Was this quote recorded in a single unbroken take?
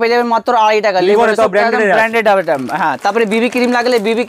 yes; 0 cuts

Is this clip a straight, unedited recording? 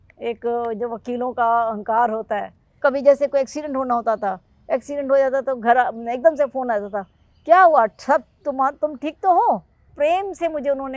no; 2 cuts; at 2.8 s, 9.9 s

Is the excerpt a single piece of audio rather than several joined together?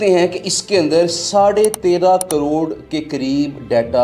yes; 0 cuts

